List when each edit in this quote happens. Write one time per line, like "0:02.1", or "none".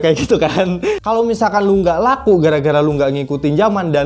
0:01.0